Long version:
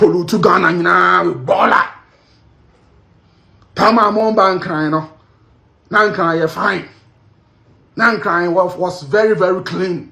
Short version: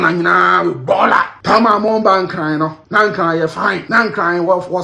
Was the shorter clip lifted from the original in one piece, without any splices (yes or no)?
no